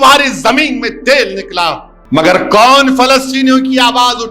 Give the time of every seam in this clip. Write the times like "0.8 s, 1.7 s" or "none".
1.9 s